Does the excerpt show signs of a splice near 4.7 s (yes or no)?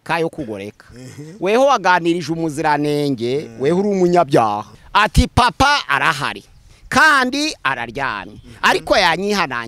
yes